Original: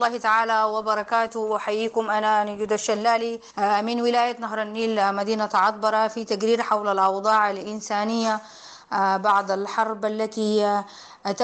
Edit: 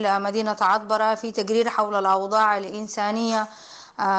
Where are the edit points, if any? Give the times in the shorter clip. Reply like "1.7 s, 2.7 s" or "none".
none